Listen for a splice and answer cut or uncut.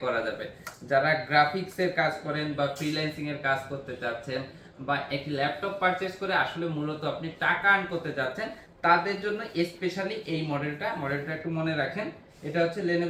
uncut